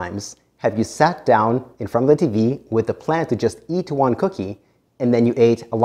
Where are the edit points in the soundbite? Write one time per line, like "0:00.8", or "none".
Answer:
none